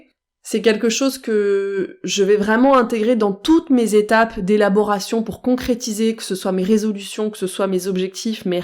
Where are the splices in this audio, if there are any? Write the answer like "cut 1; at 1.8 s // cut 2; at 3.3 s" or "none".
none